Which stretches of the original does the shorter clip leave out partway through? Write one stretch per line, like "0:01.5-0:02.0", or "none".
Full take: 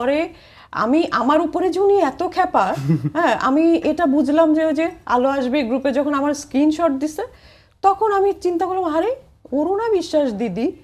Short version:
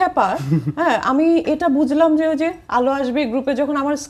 none